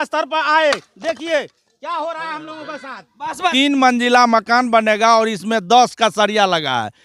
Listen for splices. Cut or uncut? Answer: cut